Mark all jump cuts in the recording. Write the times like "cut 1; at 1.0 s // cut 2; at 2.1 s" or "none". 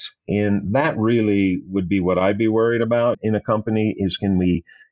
cut 1; at 3.2 s